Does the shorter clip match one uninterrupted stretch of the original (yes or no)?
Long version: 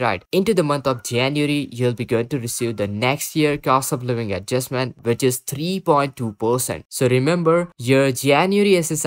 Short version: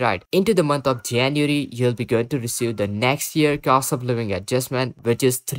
yes